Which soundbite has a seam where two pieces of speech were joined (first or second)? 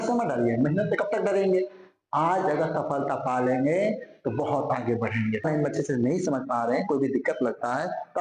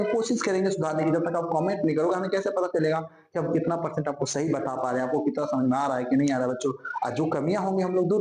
first